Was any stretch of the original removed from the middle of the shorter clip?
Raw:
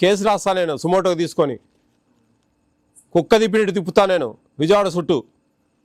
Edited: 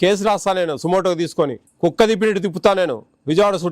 yes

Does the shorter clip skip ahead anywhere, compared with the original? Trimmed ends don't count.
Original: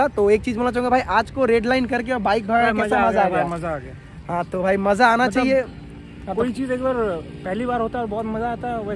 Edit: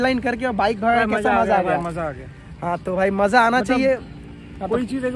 no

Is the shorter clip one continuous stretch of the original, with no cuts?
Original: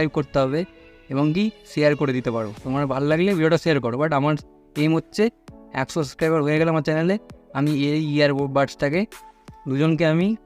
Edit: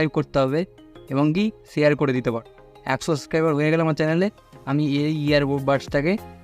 no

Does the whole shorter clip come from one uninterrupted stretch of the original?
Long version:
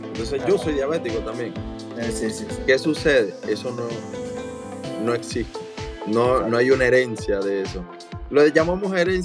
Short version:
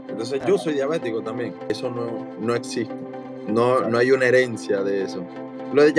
no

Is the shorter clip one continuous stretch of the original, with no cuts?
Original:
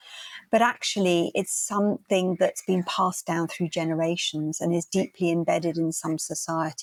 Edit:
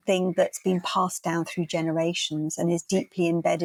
yes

